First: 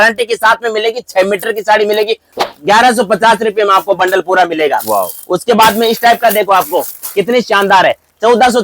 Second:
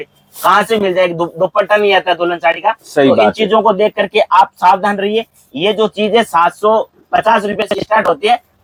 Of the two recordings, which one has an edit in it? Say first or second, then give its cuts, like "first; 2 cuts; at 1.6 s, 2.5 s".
first; 1 cut; at 2.3 s